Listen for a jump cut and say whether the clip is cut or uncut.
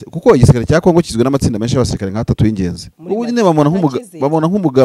cut